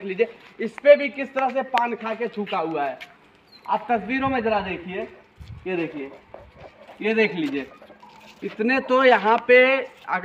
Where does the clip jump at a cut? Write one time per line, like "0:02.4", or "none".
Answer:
none